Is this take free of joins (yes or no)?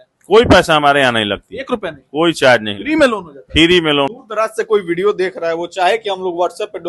no